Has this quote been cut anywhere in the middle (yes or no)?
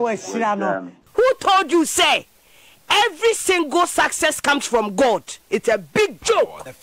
yes